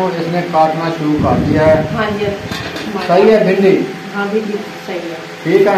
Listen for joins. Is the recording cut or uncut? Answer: uncut